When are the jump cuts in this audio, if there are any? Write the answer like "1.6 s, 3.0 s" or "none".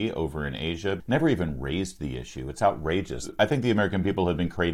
1.0 s, 3.3 s